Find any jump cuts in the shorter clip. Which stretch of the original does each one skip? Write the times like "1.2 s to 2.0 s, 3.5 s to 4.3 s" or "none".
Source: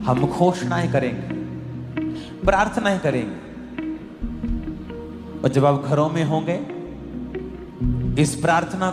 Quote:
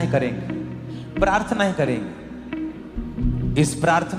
1.8 s to 2.3 s, 4.4 s to 7.8 s